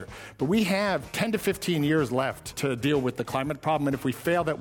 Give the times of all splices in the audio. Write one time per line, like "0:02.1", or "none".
0:01.1
0:02.5